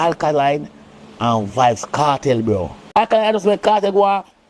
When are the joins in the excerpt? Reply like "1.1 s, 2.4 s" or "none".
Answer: 2.8 s